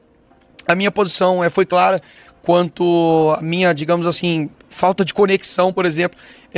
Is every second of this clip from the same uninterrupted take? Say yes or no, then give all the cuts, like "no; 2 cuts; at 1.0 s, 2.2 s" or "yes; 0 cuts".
yes; 0 cuts